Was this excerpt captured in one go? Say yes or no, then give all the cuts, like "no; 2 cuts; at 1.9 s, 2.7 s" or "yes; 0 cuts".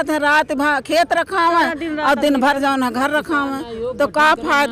yes; 0 cuts